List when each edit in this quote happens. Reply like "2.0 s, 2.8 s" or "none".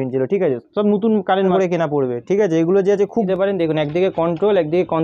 1.5 s, 3.3 s